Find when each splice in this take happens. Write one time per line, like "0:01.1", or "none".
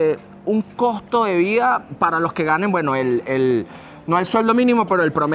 none